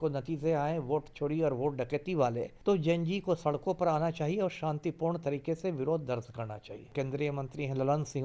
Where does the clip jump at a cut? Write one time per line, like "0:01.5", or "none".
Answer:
0:02.5
0:06.9